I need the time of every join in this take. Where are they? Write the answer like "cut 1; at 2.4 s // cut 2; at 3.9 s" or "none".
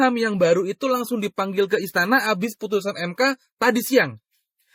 none